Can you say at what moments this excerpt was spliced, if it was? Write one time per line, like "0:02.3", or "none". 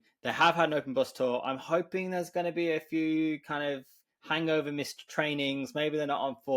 none

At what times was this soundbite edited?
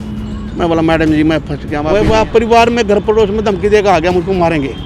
0:01.7

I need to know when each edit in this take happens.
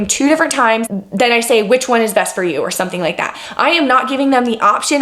0:01.0

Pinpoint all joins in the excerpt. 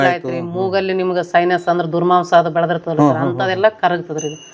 none

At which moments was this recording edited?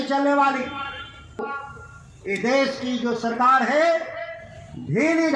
0:01.4

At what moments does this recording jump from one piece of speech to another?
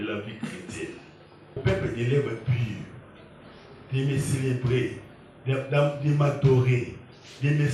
0:01.6

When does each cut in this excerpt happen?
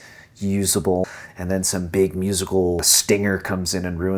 0:01.2
0:02.9

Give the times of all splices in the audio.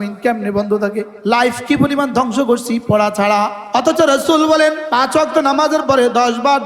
0:01.1
0:03.6
0:04.8

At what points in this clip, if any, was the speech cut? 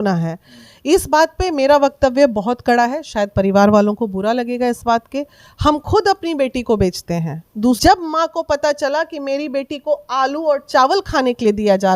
0:07.8

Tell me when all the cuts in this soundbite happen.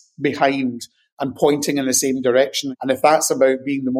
0:02.6

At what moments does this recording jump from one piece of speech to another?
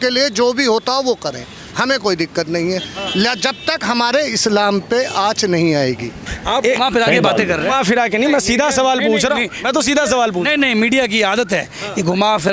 0:06.2

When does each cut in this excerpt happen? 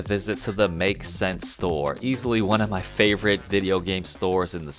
none

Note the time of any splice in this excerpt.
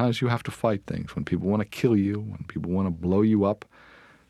none

